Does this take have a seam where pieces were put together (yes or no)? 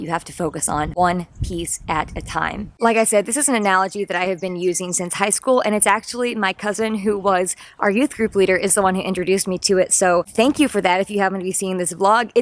no